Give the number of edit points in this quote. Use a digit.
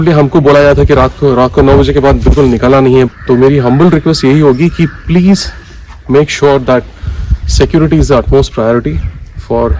1